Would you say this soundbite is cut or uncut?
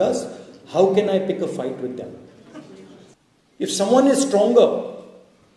cut